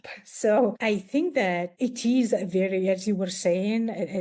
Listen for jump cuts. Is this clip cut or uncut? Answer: cut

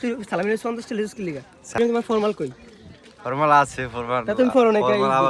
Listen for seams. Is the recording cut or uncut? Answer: cut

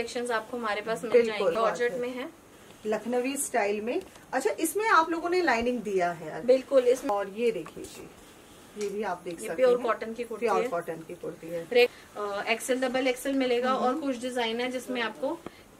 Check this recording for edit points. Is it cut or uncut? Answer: cut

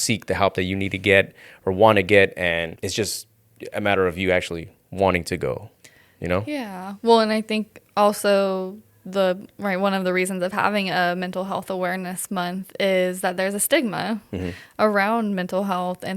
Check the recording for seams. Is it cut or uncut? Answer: cut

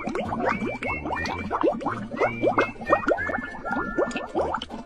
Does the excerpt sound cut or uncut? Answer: uncut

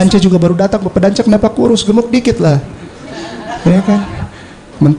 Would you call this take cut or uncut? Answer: uncut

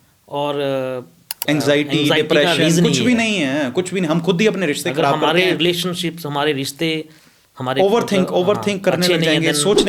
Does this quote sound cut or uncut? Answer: uncut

